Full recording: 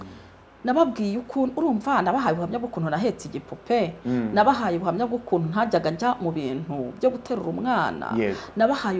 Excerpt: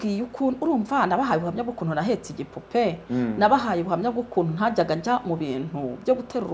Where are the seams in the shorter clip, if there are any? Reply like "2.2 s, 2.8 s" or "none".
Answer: none